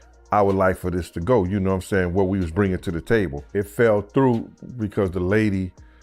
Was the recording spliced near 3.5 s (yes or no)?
yes